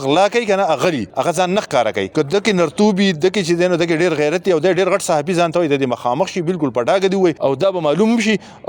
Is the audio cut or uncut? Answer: cut